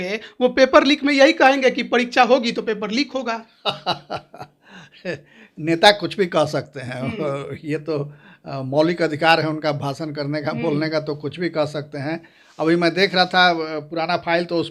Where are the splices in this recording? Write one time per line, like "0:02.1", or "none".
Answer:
none